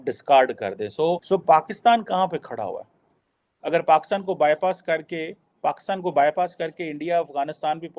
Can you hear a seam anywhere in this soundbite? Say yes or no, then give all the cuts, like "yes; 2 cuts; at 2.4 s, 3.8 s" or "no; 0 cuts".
yes; 1 cut; at 1.2 s